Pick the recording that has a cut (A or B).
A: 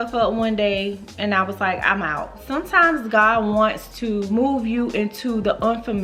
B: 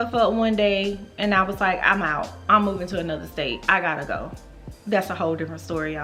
A